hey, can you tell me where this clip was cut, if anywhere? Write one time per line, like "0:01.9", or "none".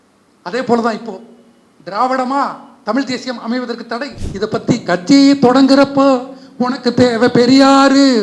0:04.2